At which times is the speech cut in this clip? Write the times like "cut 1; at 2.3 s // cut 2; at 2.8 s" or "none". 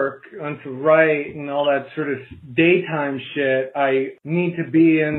cut 1; at 4.1 s